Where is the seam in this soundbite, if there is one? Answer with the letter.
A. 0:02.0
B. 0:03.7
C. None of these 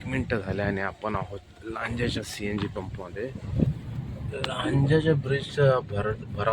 B